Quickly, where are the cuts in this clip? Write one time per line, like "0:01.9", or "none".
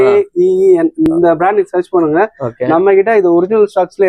none

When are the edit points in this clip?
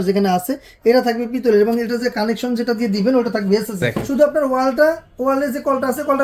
0:04.0

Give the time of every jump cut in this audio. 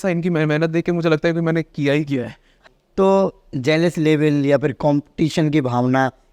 0:02.5

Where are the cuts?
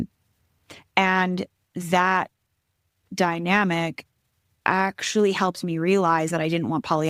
none

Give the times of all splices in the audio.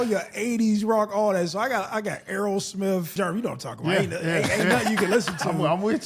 0:03.1

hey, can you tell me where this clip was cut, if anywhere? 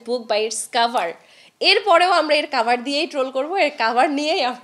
none

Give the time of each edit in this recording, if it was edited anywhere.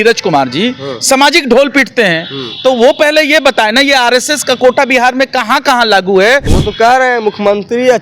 0:06.5

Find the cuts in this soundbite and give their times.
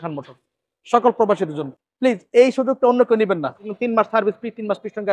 0:03.7

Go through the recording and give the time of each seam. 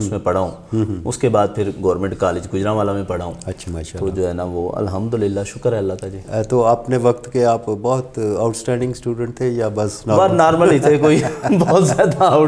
none

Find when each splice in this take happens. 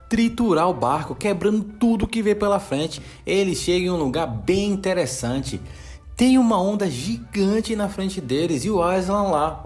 0:03.1

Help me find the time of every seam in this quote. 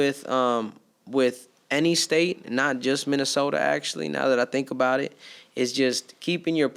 none

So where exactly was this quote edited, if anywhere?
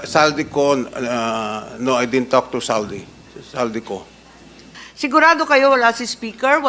0:04.8

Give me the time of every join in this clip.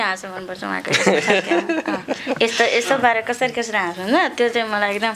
none

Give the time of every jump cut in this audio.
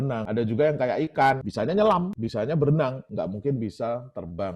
0:01.5
0:02.2

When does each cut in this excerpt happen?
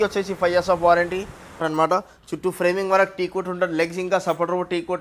0:01.6

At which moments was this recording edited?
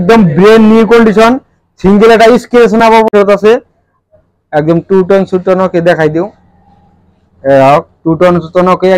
0:03.1

